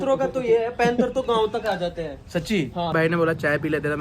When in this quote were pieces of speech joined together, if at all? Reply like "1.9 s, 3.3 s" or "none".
2.9 s